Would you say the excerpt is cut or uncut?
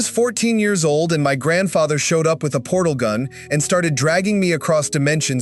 uncut